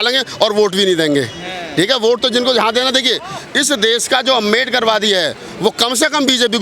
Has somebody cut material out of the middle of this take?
no; 0 cuts

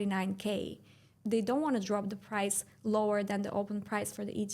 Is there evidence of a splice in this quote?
yes; 1 cut; at 1.1 s

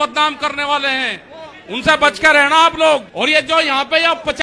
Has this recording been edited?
yes; 1 cut; at 3.1 s

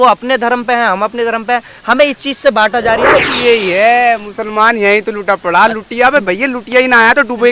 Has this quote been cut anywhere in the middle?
yes; 1 cut; at 3.3 s

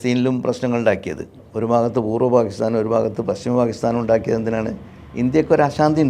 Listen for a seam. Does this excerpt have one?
yes; 1 cut; at 1.4 s

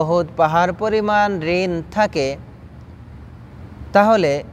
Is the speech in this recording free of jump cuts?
yes; 0 cuts

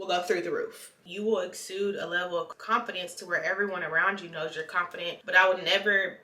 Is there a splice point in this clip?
yes; 2 cuts; at 1.0 s, 5.2 s

